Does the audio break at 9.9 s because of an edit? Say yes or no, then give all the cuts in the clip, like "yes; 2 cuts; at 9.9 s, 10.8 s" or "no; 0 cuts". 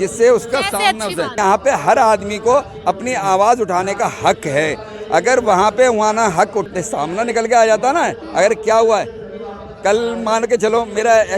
no; 2 cuts; at 1.4 s, 6.7 s